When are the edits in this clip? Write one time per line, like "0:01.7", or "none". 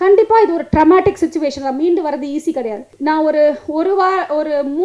0:02.9